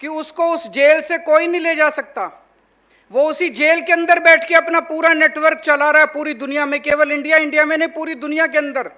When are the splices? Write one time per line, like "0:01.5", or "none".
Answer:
none